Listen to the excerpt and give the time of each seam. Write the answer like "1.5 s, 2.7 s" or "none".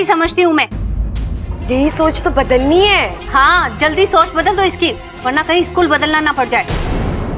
none